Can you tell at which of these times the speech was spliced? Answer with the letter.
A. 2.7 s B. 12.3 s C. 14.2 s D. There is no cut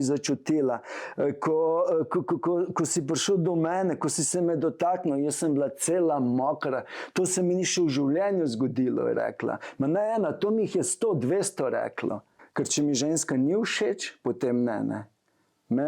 B